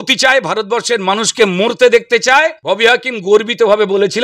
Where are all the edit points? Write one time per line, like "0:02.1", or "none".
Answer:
0:02.6

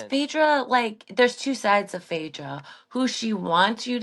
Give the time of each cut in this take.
none

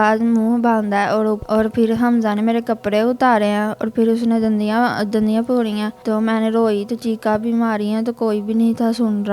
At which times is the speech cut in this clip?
0:01.4
0:05.9

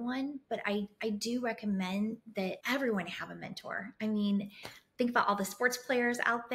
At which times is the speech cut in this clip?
0:02.6

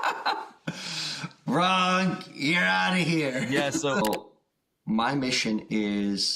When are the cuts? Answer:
0:04.0

